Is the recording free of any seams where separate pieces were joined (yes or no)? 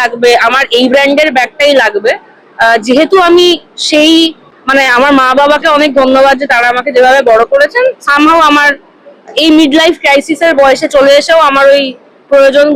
yes